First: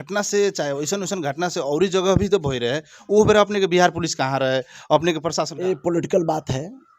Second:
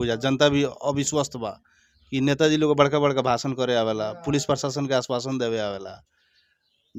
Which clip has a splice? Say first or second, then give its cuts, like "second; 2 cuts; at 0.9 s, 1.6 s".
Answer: first; 1 cut; at 5.5 s